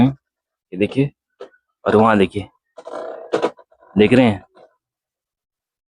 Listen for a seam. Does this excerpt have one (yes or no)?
no